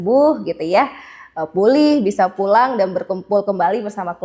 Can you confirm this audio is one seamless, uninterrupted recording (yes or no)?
yes